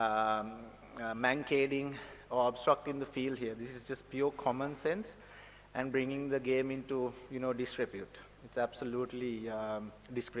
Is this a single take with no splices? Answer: yes; 0 cuts

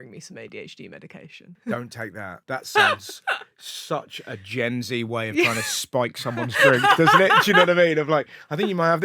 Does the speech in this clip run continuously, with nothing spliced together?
no; 2 cuts; at 1.5 s, 2.3 s

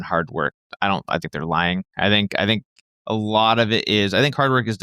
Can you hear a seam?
no; 0 cuts

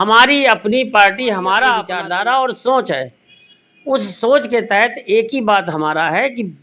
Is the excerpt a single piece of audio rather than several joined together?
no; 1 cut; at 1.9 s

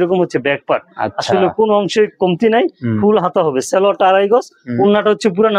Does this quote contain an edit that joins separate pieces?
no; 0 cuts

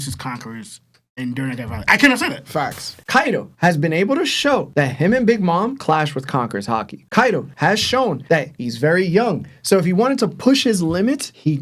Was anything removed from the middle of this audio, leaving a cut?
yes; 1 cut; at 2.9 s

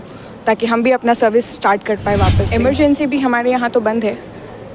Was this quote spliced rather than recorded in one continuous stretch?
yes; 1 cut; at 2.4 s

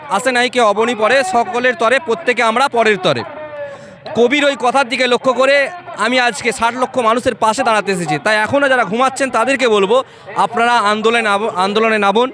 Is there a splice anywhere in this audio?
no; 0 cuts

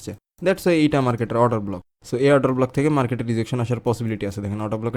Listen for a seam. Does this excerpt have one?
no; 0 cuts

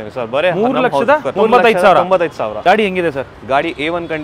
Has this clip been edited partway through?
yes; 2 cuts; at 1.3 s, 2.5 s

